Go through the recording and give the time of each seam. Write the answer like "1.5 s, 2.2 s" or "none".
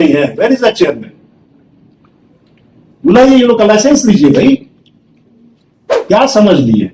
6.0 s